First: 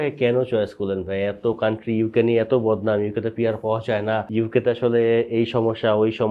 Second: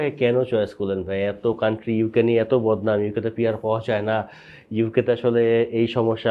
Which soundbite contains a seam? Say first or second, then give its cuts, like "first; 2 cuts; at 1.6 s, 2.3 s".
first; 1 cut; at 4.3 s